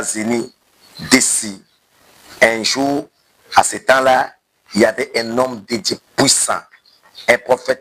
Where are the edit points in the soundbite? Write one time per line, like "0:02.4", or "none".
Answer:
none